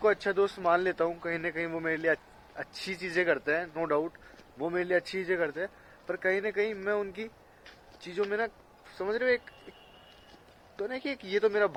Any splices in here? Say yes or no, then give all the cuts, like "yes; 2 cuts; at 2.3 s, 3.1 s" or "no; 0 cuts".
no; 0 cuts